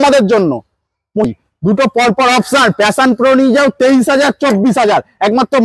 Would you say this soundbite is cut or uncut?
cut